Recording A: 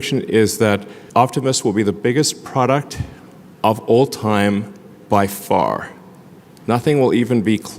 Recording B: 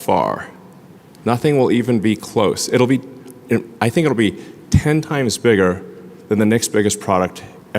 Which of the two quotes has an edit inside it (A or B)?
A